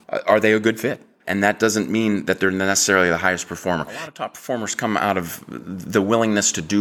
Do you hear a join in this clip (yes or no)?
yes